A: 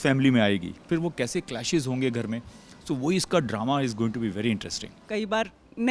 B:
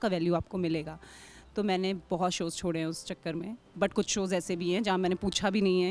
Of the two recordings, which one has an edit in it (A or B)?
A